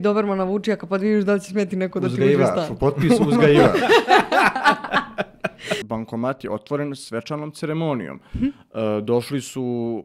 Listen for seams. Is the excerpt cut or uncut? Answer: cut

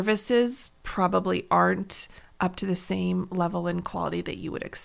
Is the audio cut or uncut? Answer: uncut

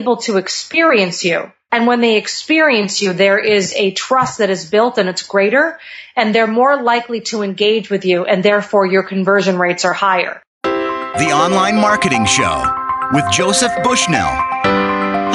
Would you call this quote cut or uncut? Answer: cut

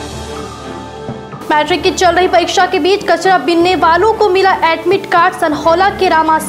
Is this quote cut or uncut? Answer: uncut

